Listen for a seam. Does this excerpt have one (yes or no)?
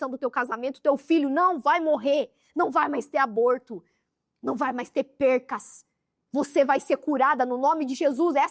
no